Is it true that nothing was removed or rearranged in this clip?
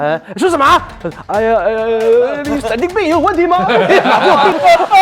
yes; 0 cuts

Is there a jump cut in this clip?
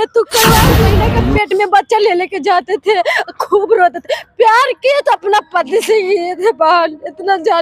yes; 1 cut; at 1.0 s

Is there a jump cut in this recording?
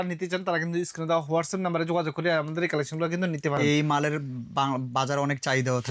no; 0 cuts

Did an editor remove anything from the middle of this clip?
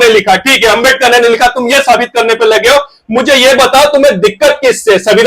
no; 0 cuts

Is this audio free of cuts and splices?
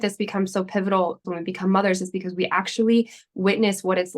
no; 1 cut; at 1.2 s

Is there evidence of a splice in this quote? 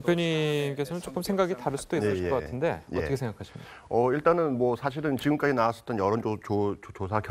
yes; 1 cut; at 2.7 s

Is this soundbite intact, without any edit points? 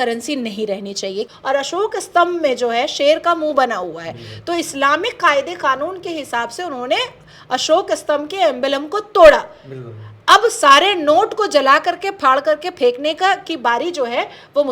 no; 1 cut; at 1.3 s

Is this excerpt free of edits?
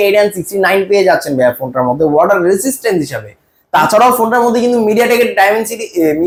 yes; 0 cuts

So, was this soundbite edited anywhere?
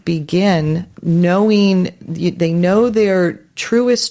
yes; 1 cut; at 0.9 s

